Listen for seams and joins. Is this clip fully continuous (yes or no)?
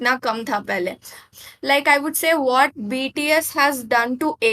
no